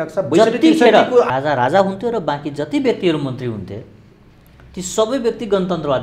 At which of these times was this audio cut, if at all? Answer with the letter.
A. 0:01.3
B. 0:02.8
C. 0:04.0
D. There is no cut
A